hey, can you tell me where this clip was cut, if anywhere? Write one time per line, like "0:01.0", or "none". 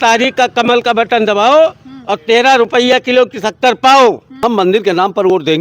0:04.3